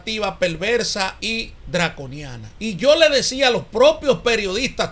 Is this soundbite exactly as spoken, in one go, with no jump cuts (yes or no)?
no